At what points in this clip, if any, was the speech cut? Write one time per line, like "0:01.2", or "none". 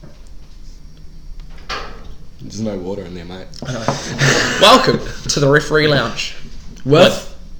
none